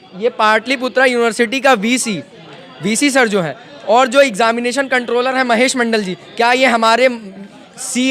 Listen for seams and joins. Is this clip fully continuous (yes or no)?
yes